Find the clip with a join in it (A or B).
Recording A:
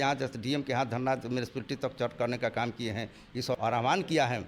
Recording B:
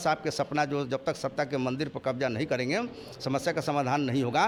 A